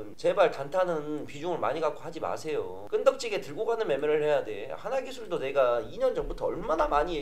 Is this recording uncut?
yes; 0 cuts

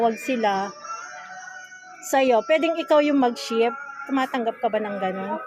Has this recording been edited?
no; 0 cuts

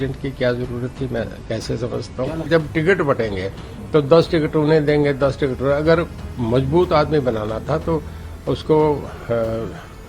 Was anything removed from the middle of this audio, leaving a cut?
yes; 1 cut; at 2.5 s

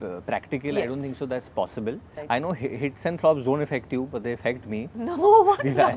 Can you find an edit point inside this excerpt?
yes; 1 cut; at 2.1 s

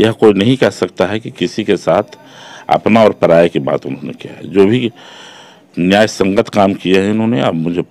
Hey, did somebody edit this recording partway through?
no; 0 cuts

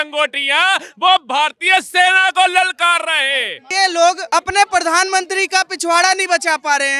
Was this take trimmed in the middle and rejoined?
yes; 2 cuts; at 3.6 s, 4.2 s

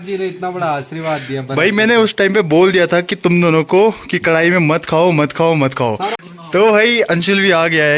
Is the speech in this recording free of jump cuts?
no; 1 cut; at 6.2 s

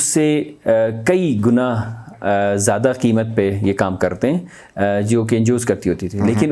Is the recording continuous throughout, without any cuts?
yes; 0 cuts

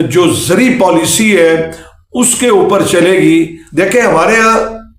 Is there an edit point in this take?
yes; 1 cut; at 3.6 s

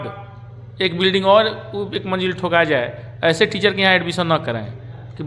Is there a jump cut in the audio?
no; 0 cuts

